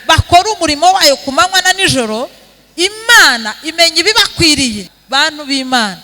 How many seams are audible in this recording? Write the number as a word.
one